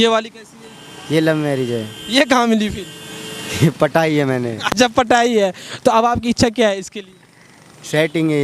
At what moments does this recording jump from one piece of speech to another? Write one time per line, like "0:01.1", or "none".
none